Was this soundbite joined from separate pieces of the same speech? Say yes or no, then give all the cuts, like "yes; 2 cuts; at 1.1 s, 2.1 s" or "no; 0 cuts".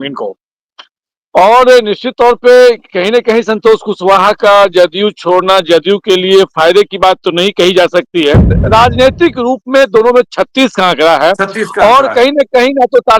yes; 1 cut; at 8.5 s